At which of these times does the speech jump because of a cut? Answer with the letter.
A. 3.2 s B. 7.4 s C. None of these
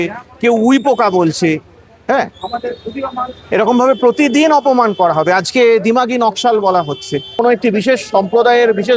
B